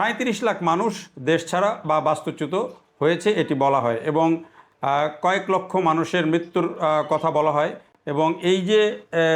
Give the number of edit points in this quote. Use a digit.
0